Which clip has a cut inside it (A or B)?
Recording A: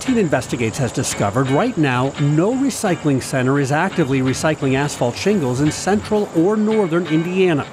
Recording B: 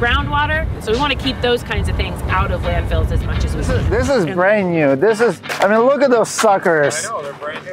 B